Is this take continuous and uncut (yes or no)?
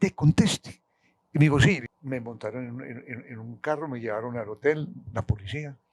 no